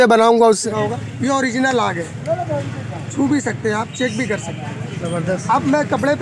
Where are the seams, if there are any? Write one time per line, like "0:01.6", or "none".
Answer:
0:01.2